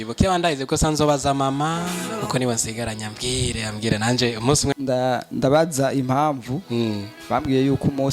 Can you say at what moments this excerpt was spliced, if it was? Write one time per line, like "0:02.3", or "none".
0:04.8